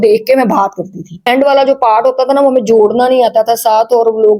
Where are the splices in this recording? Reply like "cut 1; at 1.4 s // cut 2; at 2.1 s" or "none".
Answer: cut 1; at 1.2 s